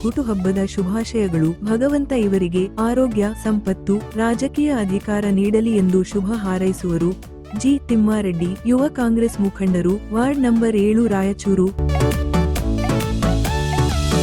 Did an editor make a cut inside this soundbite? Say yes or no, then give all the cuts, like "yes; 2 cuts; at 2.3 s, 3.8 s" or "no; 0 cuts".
no; 0 cuts